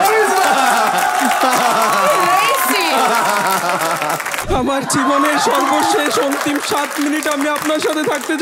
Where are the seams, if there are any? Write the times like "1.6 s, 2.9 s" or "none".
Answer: 4.3 s